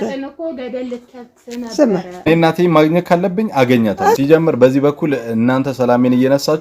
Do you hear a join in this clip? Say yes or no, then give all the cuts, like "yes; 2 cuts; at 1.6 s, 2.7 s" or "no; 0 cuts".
yes; 2 cuts; at 2.3 s, 4.2 s